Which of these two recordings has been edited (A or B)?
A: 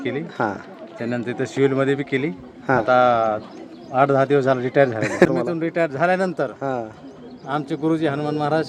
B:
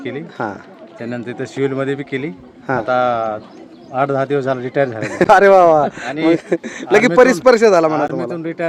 A